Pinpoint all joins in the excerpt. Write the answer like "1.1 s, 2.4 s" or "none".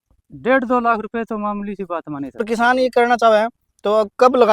2.4 s